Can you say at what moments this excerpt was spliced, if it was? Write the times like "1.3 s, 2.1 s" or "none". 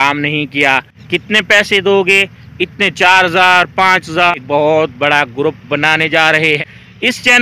0.9 s, 4.3 s, 6.6 s